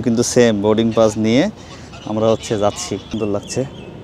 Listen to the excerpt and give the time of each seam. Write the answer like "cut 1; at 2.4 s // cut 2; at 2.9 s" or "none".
cut 1; at 3.1 s